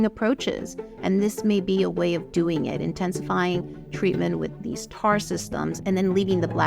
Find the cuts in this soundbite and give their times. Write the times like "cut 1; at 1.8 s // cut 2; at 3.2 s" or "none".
cut 1; at 5.8 s